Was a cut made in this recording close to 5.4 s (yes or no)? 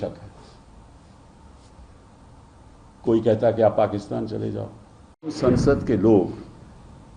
yes